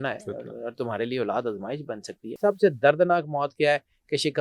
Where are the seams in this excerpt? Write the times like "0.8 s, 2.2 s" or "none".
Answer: 2.4 s